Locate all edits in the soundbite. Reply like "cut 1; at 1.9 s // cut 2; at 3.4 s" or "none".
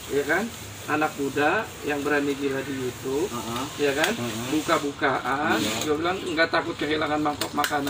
none